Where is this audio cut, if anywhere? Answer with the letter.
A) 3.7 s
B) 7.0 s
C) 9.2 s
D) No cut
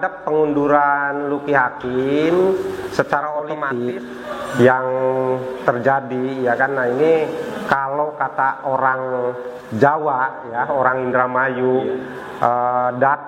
A